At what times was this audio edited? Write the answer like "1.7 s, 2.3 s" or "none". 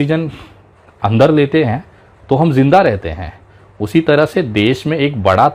none